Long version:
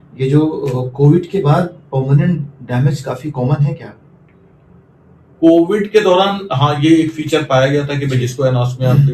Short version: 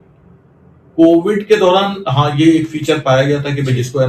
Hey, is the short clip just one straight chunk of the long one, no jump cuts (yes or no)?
yes